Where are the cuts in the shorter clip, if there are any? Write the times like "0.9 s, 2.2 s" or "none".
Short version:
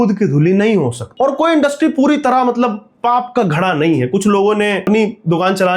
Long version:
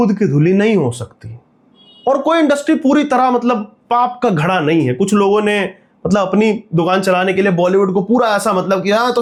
1.0 s, 4.8 s